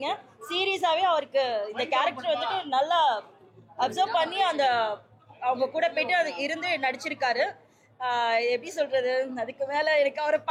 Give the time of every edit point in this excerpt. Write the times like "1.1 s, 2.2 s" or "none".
none